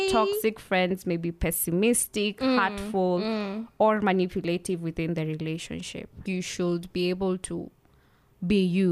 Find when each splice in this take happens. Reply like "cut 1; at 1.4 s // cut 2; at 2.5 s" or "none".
cut 1; at 6.2 s